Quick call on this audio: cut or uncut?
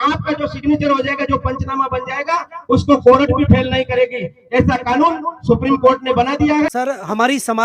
cut